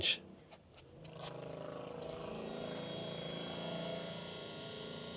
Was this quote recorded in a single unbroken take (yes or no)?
yes